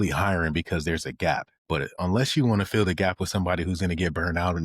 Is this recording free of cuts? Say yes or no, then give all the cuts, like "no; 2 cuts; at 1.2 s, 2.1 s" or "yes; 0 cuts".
no; 1 cut; at 1.8 s